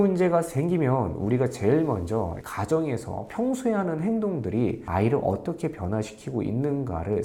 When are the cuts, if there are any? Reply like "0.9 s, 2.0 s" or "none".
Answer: none